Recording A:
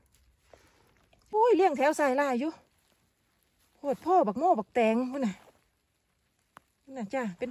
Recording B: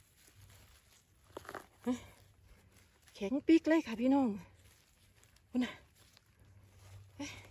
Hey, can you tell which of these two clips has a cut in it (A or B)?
A